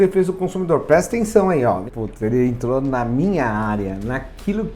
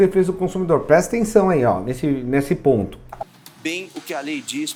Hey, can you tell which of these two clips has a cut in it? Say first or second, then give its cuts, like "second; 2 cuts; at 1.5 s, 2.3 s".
first; 1 cut; at 1.9 s